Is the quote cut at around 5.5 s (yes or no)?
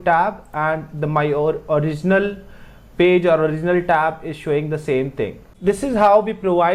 yes